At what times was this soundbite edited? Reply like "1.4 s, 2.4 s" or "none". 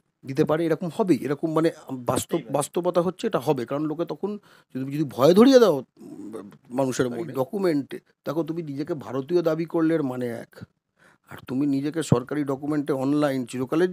7.2 s